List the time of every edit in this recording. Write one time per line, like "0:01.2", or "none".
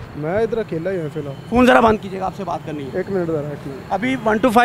none

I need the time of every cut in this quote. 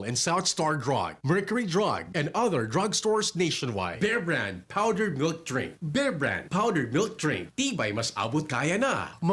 0:03.9

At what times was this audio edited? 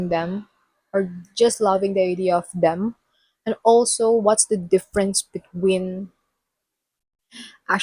none

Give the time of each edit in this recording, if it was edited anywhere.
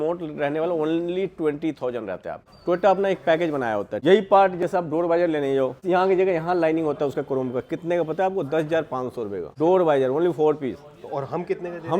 0:02.4
0:03.9
0:05.8
0:09.4

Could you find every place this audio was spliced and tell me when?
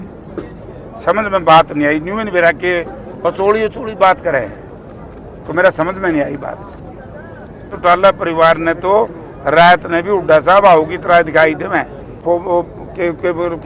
0:07.7
0:12.2

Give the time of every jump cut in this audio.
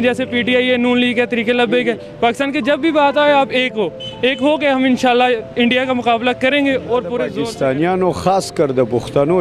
0:07.3

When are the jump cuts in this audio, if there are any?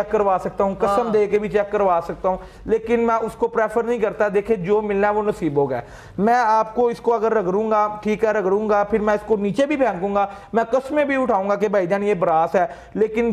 none

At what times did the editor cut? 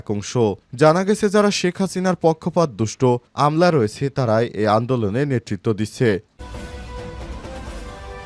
0:06.3

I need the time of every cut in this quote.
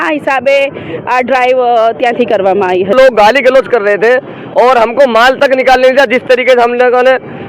0:02.9

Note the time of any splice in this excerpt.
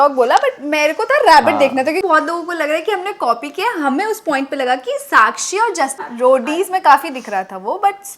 0:02.0
0:06.0

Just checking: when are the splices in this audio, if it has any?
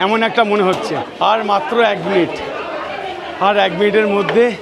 0:01.1

